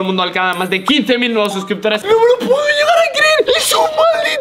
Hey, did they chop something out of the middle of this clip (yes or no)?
yes